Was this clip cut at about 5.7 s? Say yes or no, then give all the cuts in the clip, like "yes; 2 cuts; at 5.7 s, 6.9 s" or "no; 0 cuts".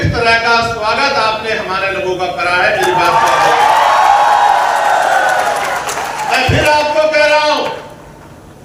no; 0 cuts